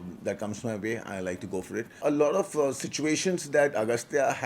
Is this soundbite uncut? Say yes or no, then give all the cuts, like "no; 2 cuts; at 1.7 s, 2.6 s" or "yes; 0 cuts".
no; 1 cut; at 2.0 s